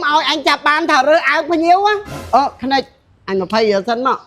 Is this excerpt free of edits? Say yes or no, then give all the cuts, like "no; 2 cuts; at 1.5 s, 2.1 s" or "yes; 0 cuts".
no; 1 cut; at 2.1 s